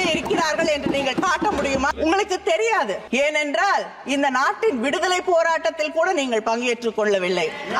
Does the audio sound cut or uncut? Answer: cut